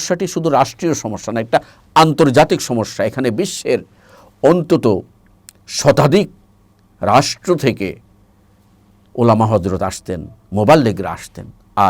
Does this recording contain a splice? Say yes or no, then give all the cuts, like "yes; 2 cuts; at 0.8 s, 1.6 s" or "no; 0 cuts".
no; 0 cuts